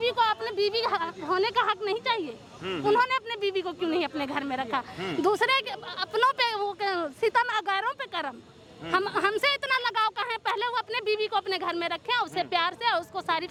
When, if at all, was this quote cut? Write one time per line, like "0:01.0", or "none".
none